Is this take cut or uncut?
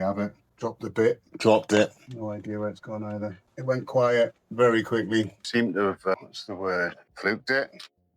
cut